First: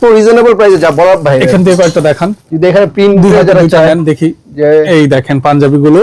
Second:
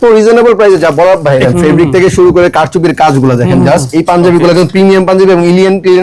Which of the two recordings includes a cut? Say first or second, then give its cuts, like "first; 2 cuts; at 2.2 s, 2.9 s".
second; 1 cut; at 1.5 s